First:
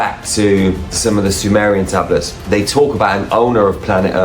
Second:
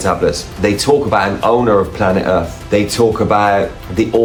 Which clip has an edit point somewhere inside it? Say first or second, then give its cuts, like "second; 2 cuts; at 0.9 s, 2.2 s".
first; 1 cut; at 0.9 s